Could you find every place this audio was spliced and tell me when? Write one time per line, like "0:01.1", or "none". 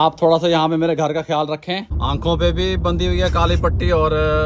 0:01.9